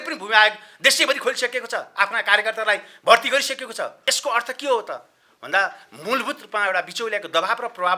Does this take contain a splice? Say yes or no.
yes